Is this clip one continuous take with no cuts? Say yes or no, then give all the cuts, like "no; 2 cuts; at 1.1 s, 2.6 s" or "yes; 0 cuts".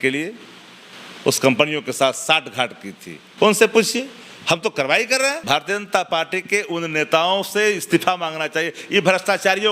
no; 1 cut; at 5.4 s